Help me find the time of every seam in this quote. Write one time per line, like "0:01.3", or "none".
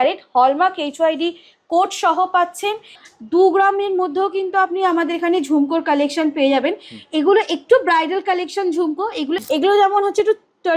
0:03.0
0:09.4